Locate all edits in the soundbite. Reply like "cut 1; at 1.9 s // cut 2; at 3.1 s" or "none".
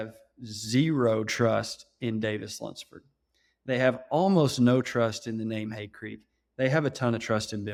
none